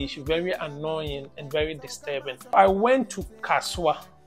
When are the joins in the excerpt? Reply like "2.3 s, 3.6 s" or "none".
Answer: 2.5 s